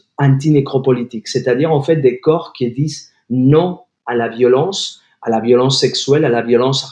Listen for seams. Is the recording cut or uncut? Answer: uncut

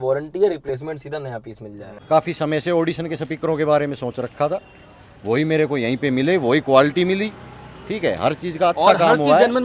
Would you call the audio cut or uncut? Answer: cut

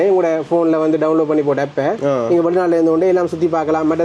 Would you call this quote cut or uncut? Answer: uncut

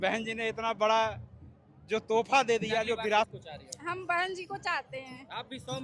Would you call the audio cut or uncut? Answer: cut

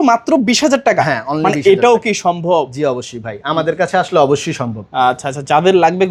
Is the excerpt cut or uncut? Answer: uncut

